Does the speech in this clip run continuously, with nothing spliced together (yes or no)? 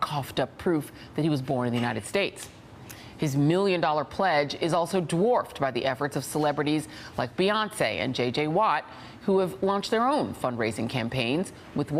yes